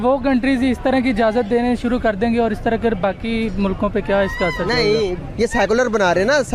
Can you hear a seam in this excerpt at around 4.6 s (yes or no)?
no